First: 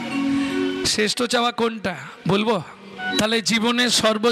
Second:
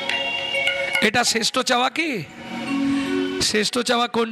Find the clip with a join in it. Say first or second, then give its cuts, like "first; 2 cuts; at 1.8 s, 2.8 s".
first; 1 cut; at 3.1 s